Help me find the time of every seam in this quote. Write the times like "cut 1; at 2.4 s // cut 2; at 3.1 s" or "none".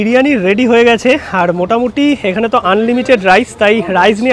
none